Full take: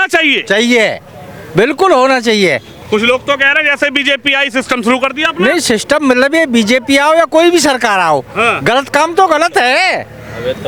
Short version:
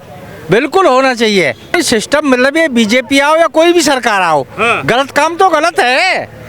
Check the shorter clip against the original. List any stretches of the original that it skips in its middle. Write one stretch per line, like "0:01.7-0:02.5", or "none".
0:02.8-0:05.5